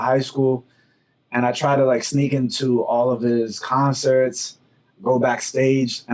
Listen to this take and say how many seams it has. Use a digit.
0